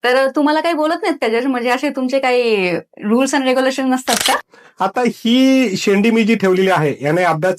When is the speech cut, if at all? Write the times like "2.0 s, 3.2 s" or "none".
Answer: 4.5 s